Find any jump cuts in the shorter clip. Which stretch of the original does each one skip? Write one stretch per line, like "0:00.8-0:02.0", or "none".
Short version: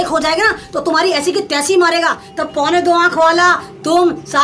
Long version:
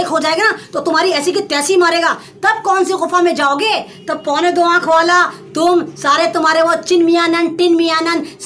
0:02.3-0:04.0